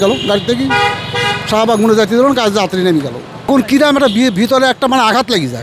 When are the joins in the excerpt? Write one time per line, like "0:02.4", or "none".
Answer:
none